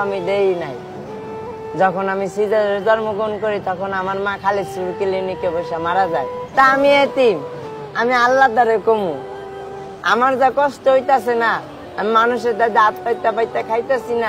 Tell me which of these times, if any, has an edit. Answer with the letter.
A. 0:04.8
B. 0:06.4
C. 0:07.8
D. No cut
B